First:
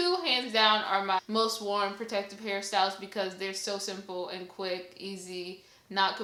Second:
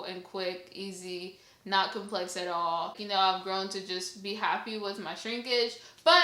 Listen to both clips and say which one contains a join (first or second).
second